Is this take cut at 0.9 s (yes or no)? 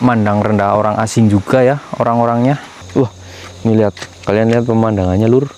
no